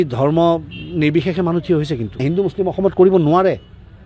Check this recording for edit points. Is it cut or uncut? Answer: cut